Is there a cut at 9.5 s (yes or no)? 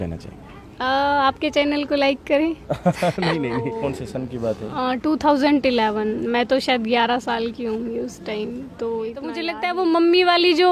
yes